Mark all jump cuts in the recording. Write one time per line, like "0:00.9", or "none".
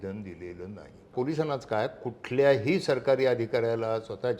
0:01.1